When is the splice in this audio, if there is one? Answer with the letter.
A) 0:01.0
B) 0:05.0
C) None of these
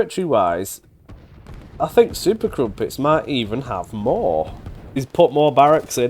B